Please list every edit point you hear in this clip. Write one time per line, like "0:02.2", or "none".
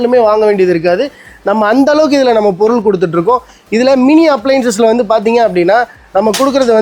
none